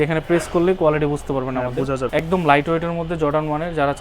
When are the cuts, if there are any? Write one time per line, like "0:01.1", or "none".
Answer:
0:02.1